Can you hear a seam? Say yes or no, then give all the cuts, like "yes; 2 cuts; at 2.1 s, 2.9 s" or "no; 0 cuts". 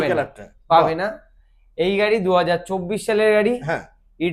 no; 0 cuts